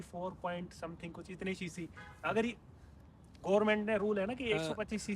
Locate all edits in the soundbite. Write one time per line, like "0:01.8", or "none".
none